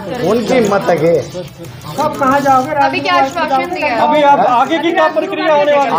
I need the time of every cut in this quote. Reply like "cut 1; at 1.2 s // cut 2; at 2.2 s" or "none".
none